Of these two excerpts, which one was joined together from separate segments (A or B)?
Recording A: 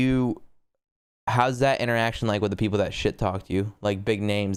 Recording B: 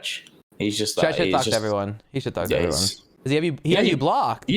B